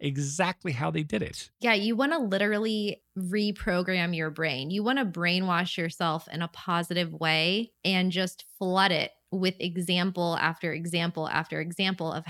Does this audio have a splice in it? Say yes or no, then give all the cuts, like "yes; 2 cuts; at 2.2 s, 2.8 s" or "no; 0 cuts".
yes; 2 cuts; at 3.1 s, 7.7 s